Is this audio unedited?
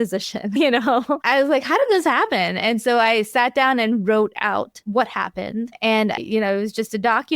no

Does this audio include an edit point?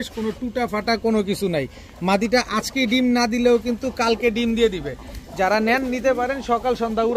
no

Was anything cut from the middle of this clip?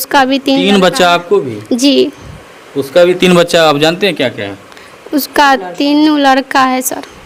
no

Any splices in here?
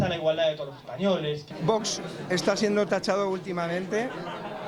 yes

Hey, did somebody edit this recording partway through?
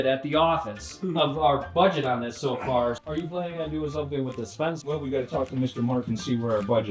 yes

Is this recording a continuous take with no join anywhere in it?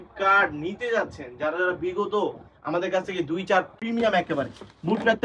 no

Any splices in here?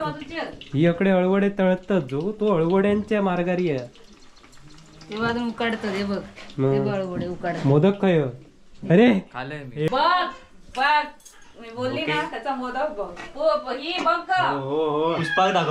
yes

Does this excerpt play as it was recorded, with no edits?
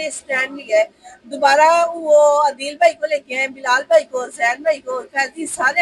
yes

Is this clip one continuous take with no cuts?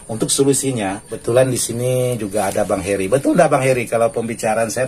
no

